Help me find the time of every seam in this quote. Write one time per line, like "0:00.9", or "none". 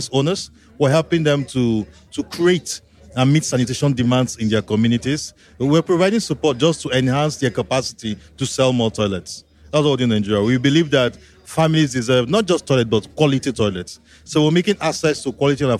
none